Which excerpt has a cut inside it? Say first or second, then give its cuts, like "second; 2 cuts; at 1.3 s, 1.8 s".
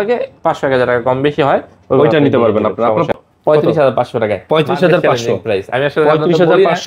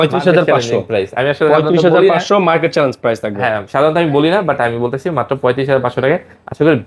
first; 1 cut; at 3.2 s